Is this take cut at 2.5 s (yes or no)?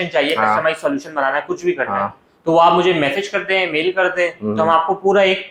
no